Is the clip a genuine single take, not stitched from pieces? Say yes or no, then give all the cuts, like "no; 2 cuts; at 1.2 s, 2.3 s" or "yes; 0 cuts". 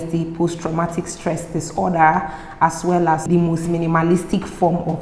no; 1 cut; at 3.3 s